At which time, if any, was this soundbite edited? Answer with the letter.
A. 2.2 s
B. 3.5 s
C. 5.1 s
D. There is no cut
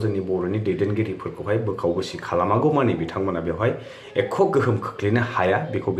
D